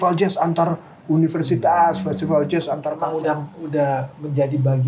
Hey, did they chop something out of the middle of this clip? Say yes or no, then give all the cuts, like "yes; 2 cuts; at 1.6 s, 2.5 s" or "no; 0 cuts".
yes; 1 cut; at 2.9 s